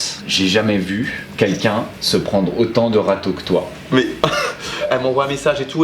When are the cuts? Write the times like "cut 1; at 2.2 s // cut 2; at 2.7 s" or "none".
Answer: cut 1; at 4.8 s